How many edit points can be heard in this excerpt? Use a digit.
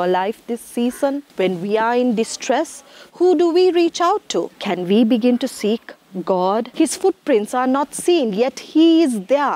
3